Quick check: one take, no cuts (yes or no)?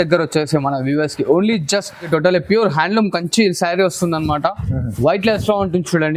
no